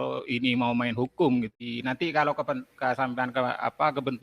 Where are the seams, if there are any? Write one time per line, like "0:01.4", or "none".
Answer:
0:01.6